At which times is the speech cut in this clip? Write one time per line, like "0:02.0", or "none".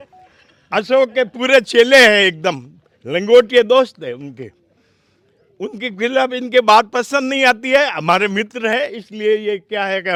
none